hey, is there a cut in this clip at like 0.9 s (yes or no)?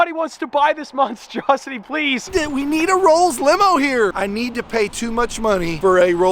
no